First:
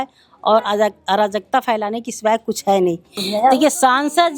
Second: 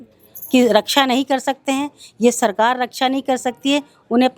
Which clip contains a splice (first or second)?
first